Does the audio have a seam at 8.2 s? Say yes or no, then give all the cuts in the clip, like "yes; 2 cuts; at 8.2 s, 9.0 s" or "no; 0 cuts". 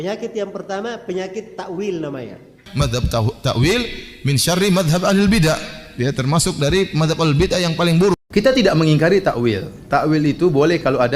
yes; 2 cuts; at 2.6 s, 8.2 s